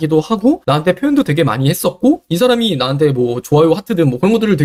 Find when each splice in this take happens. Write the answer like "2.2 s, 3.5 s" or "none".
none